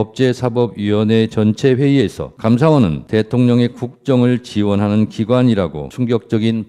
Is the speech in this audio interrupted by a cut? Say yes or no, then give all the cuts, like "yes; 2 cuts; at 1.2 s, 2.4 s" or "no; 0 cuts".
yes; 3 cuts; at 2.3 s, 3.0 s, 5.8 s